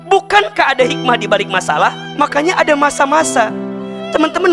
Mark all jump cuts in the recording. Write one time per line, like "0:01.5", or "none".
0:02.0

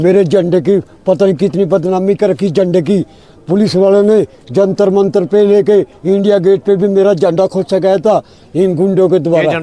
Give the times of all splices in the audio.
none

